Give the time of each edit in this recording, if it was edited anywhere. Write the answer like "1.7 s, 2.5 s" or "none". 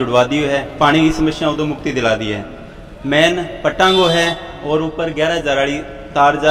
none